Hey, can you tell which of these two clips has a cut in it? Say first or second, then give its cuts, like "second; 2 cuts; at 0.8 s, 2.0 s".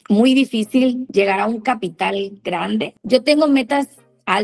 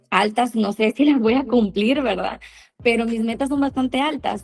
first; 2 cuts; at 1.0 s, 3.0 s